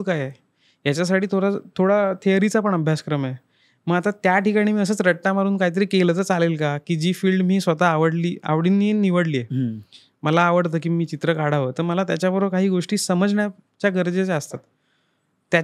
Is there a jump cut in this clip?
no; 0 cuts

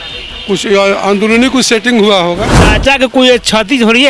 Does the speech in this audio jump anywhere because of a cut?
yes; 1 cut; at 2.6 s

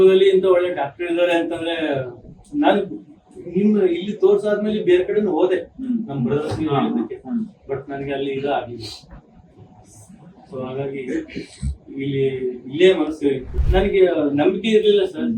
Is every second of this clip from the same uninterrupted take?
no; 1 cut; at 13.5 s

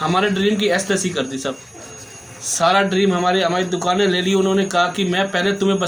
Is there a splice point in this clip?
no; 0 cuts

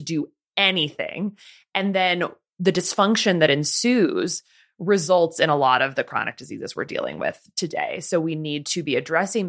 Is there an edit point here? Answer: no; 0 cuts

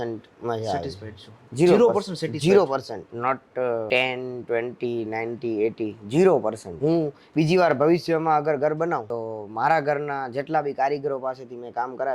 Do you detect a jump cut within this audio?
no; 0 cuts

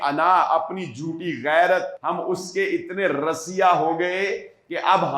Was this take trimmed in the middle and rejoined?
yes; 1 cut; at 1.9 s

